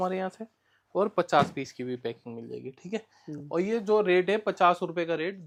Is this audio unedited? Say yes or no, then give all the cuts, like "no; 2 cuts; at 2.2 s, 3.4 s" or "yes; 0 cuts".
yes; 0 cuts